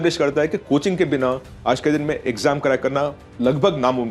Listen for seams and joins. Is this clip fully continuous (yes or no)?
yes